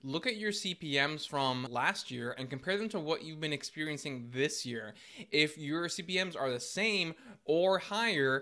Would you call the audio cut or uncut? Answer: cut